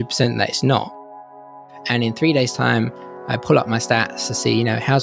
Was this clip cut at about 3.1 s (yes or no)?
no